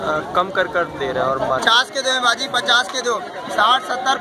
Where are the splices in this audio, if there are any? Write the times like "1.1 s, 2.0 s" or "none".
1.6 s